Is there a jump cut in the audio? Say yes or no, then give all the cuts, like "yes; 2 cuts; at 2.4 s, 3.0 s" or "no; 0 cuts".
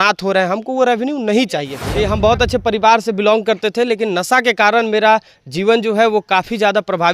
yes; 1 cut; at 1.8 s